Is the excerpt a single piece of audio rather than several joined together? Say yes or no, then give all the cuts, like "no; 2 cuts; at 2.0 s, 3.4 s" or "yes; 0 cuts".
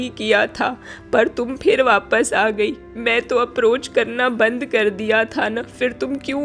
yes; 0 cuts